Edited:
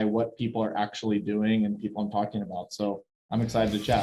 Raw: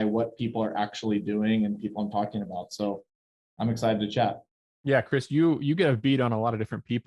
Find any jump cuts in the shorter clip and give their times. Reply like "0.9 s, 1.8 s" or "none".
3.1 s

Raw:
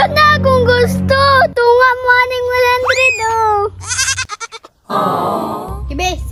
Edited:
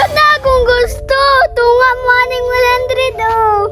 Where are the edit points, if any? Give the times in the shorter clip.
none

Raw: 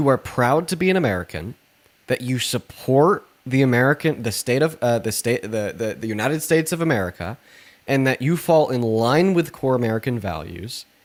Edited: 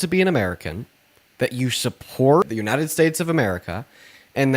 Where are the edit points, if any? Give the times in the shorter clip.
2.4 s

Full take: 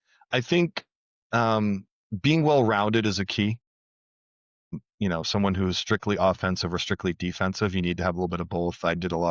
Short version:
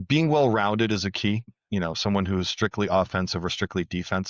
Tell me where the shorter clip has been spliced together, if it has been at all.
1.5 s

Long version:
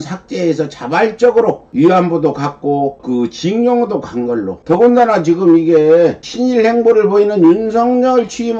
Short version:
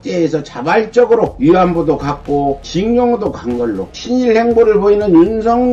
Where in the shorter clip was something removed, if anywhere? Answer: 1.3 s, 2.7 s, 3.9 s

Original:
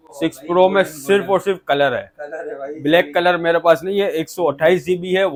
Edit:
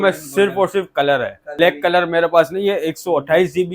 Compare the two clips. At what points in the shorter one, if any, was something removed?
1.6 s

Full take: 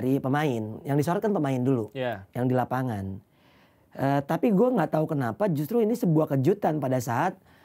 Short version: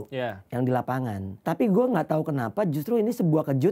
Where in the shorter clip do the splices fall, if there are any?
1.4 s

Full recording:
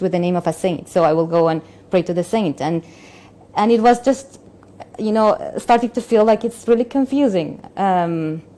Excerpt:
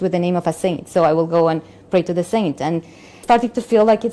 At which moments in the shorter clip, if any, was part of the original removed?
3.1 s

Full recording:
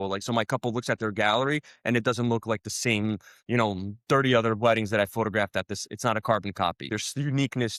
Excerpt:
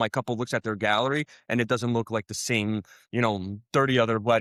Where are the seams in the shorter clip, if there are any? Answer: none

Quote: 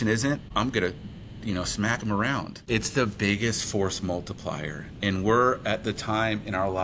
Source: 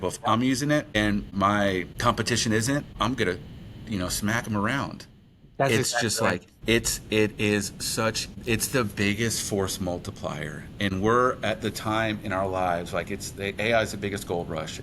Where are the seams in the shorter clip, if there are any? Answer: 2.5 s

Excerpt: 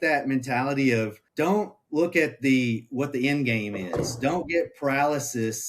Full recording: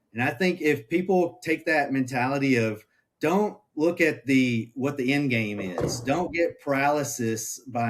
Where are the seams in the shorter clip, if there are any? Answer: 1.2 s

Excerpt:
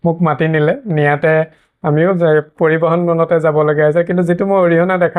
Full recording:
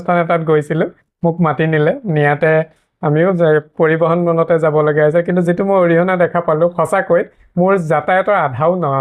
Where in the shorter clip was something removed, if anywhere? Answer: none

